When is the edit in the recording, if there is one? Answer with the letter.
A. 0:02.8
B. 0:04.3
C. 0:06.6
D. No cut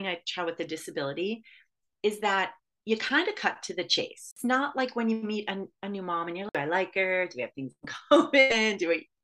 B